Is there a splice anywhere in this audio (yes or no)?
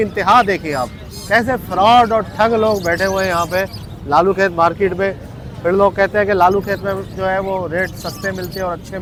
no